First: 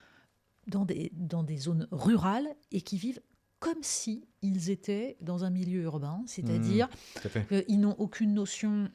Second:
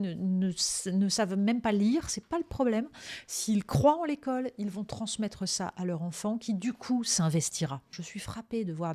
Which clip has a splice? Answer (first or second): second